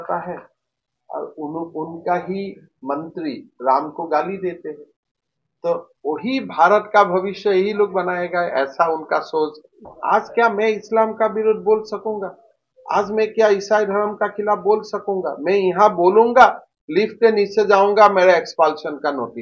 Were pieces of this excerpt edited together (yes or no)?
yes